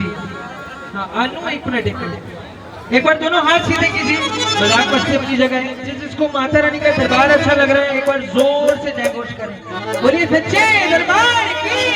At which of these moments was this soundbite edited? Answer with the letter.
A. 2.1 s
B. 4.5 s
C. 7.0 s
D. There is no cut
D